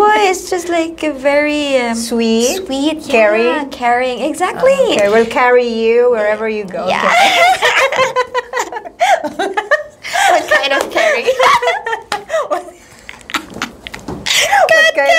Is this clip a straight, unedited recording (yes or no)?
yes